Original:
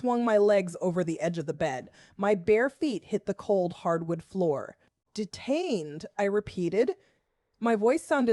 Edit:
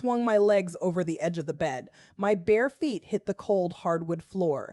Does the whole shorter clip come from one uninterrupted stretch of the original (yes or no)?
yes